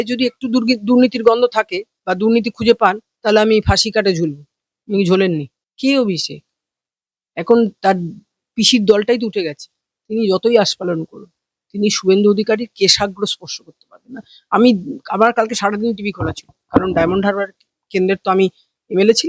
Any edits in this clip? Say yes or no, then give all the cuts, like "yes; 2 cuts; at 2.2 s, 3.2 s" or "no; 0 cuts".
yes; 1 cut; at 5.6 s